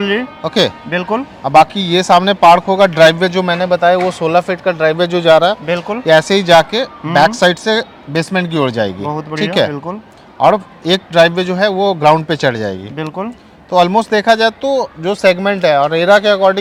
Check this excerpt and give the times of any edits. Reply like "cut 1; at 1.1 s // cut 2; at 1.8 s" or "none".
none

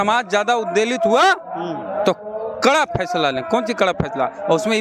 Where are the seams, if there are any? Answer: none

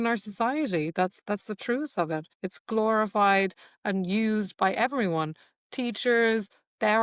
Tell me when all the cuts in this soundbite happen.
cut 1; at 2.4 s

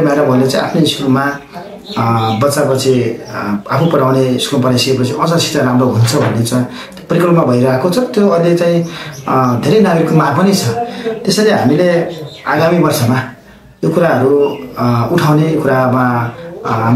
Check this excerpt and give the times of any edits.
none

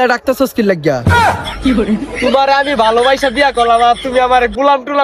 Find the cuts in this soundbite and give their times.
none

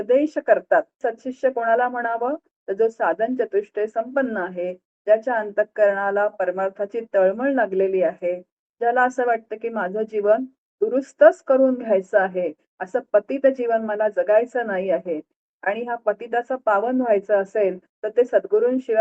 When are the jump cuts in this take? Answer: cut 1; at 0.9 s

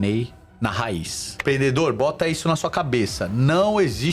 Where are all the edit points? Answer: cut 1; at 1.3 s

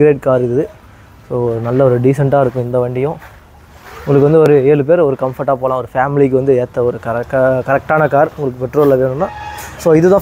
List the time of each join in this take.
none

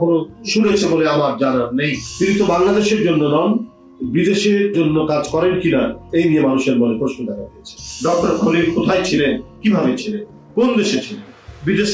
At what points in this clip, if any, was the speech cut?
cut 1; at 2.0 s // cut 2; at 7.8 s

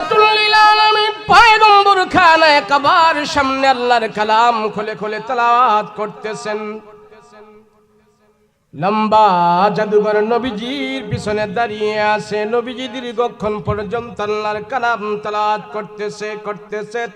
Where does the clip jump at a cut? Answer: cut 1; at 1.2 s

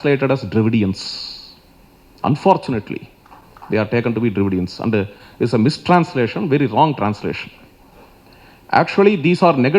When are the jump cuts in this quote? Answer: none

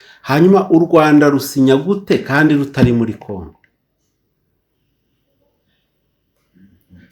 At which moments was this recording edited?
none

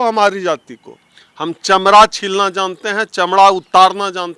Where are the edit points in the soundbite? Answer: none

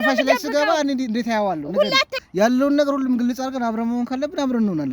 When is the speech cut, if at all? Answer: cut 1; at 2.2 s

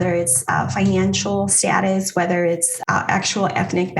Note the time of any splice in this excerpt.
cut 1; at 1.6 s // cut 2; at 2.7 s

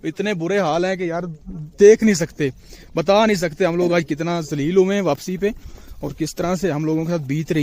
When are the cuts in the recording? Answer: none

